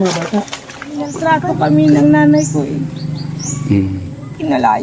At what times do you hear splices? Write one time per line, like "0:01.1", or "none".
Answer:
0:01.1